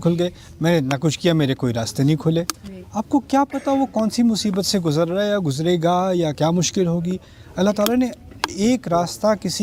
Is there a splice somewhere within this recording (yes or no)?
no